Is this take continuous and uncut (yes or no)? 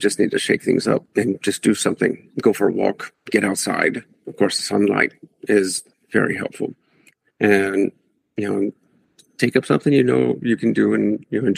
no